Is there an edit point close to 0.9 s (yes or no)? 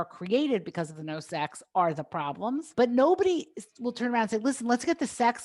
no